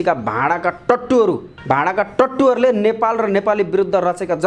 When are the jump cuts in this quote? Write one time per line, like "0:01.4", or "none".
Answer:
0:01.5